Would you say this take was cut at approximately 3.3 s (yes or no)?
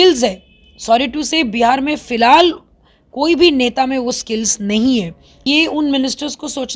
no